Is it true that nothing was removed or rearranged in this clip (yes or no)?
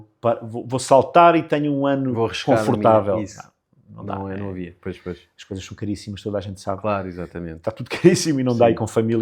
yes